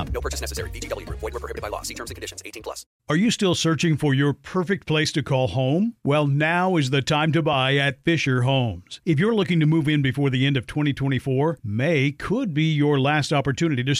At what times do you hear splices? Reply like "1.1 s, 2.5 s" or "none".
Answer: 2.9 s